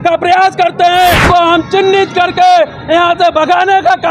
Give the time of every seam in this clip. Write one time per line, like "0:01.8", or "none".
0:01.2